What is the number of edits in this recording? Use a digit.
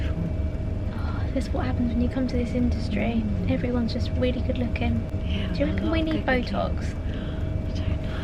0